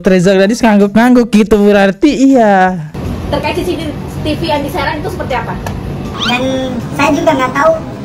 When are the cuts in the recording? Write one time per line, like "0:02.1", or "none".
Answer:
0:02.9
0:06.2